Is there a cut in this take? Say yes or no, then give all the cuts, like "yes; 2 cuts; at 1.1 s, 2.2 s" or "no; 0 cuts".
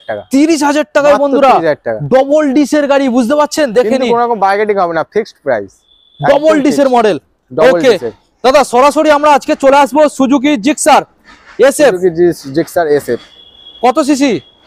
no; 0 cuts